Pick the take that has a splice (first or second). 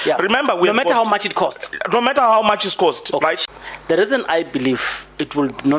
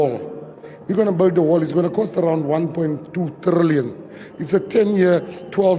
first